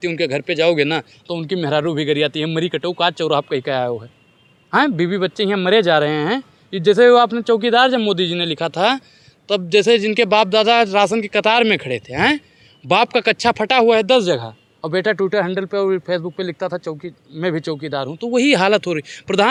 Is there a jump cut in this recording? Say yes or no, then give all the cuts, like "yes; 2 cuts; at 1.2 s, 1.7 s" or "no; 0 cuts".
no; 0 cuts